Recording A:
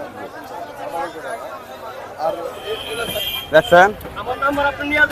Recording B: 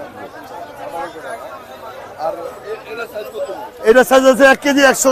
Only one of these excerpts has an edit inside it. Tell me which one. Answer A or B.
A